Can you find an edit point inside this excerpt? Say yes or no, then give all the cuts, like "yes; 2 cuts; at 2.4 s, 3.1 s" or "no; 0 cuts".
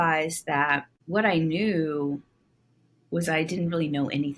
yes; 1 cut; at 0.9 s